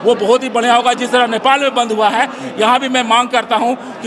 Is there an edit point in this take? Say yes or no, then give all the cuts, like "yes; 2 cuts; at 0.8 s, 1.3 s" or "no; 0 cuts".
no; 0 cuts